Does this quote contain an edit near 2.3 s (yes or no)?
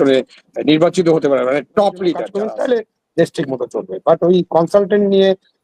yes